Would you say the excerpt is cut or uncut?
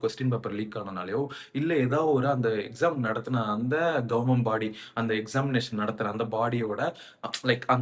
uncut